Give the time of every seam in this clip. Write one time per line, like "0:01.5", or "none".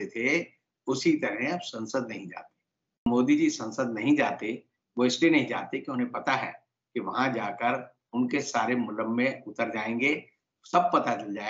0:03.1